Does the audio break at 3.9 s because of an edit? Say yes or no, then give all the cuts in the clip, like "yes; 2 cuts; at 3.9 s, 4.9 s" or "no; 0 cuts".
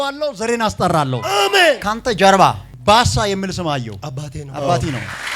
no; 1 cut; at 1.9 s